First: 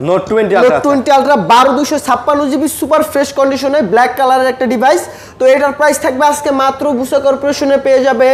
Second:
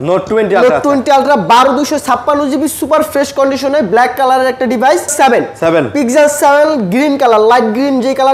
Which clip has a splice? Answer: second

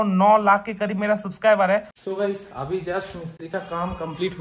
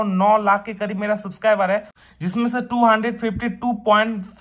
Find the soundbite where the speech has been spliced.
first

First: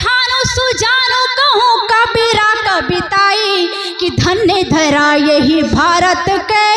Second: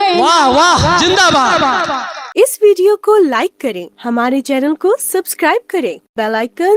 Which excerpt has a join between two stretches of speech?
second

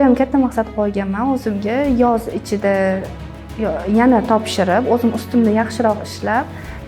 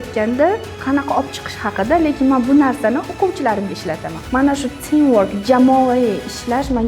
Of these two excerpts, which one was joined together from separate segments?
second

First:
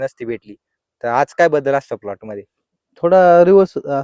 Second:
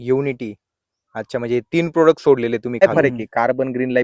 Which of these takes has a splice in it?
second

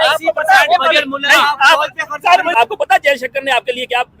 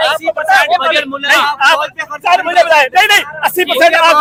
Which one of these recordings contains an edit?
first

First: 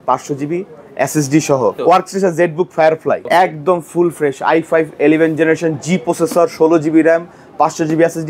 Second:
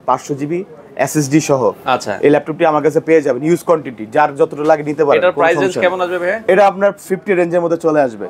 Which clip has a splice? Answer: first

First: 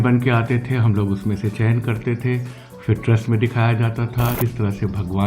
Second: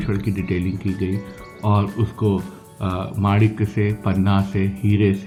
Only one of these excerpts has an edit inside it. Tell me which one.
first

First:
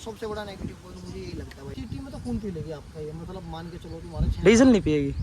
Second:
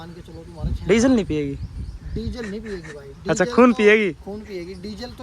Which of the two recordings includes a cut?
first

